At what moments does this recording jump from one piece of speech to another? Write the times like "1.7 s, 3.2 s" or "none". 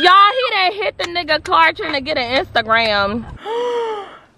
3.3 s